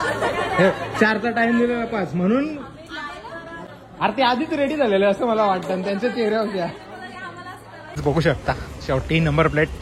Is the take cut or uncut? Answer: cut